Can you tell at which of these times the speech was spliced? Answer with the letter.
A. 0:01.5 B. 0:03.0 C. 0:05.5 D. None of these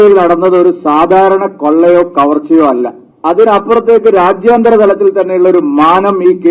B